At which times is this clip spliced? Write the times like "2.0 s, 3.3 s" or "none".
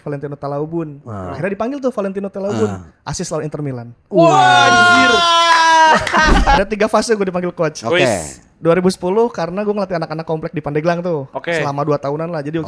6.6 s